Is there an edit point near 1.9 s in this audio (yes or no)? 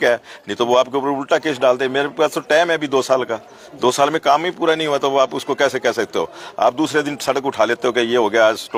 no